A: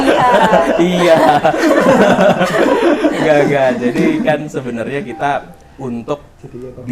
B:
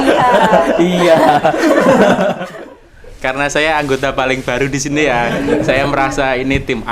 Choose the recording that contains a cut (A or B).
B